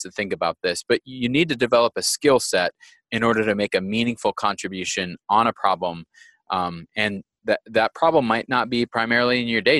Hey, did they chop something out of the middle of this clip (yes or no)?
no